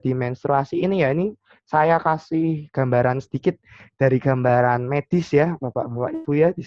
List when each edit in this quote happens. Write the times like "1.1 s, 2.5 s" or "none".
none